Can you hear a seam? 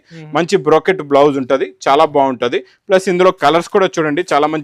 no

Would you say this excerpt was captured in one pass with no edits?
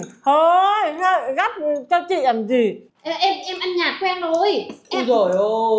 no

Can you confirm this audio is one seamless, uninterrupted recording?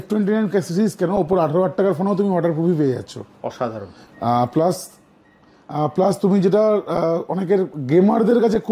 yes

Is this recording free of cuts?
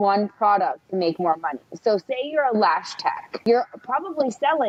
yes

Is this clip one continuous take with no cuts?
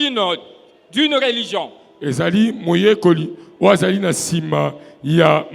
yes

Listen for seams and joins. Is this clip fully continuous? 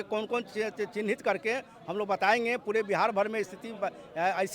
yes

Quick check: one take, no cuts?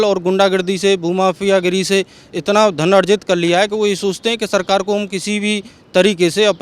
yes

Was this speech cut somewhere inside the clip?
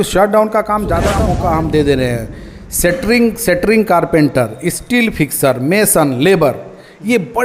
yes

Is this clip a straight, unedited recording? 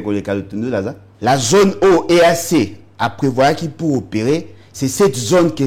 no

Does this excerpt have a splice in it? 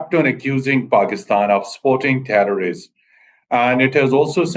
no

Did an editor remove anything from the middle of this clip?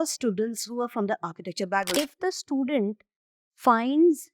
yes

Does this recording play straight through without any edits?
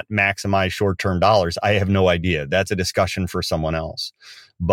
yes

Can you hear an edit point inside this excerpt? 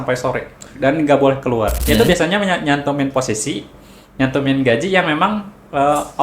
yes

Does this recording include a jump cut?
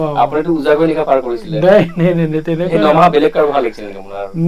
no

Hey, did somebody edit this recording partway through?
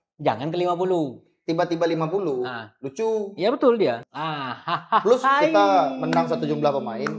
yes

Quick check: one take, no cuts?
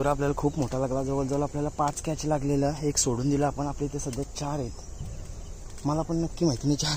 yes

